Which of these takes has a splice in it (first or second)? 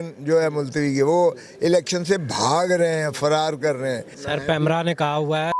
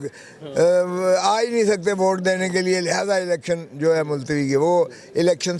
first